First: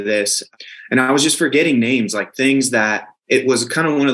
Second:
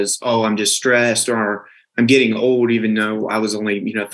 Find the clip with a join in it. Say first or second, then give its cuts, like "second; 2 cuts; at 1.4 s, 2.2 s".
first; 1 cut; at 3.1 s